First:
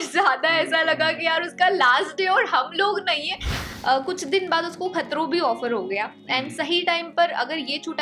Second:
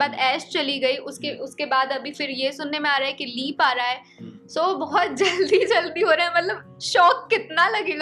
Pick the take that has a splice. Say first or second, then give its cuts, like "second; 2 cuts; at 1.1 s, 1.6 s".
first; 1 cut; at 3.6 s